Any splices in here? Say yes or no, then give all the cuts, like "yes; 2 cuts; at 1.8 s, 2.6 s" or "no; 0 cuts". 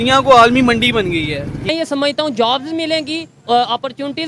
yes; 1 cut; at 1.6 s